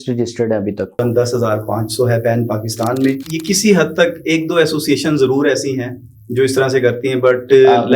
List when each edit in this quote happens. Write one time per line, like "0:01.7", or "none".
0:01.0
0:03.2